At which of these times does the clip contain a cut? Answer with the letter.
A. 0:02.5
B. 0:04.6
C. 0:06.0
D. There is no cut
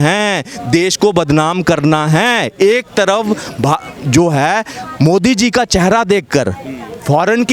D